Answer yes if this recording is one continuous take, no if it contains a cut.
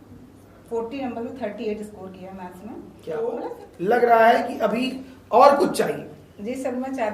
no